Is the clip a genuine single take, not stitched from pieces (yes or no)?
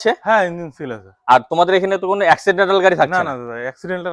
yes